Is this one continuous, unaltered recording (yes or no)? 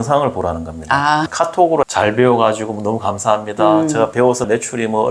no